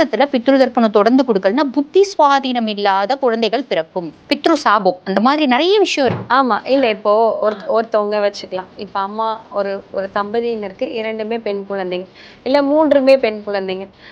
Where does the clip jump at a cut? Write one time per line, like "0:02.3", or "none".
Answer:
0:04.1
0:06.2